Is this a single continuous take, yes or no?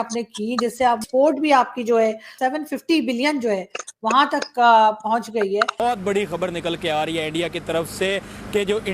no